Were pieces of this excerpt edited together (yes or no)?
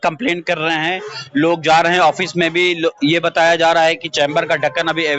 no